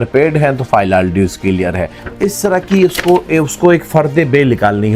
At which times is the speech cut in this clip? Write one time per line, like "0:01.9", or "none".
0:02.0